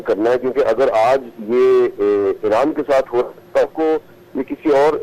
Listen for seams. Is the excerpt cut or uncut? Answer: uncut